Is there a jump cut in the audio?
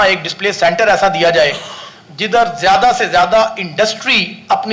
no; 0 cuts

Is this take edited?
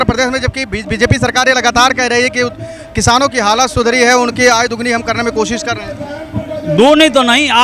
no; 0 cuts

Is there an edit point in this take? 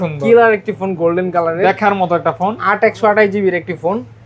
no; 0 cuts

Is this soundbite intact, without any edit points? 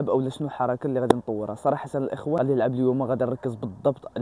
yes; 0 cuts

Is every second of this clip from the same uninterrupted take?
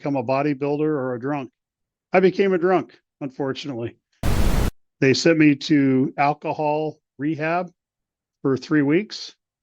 no; 1 cut; at 4.3 s

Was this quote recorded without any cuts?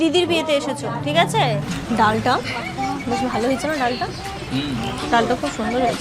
no; 1 cut; at 1.7 s

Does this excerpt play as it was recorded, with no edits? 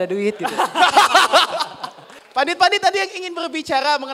no; 1 cut; at 2.2 s

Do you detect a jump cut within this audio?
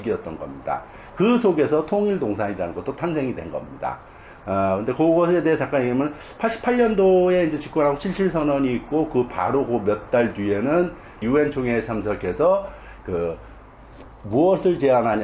no; 0 cuts

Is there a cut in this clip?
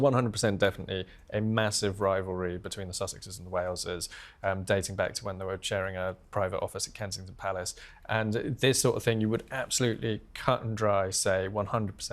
no; 0 cuts

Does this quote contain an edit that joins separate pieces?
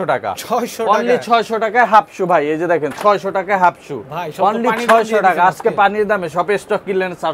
no; 0 cuts

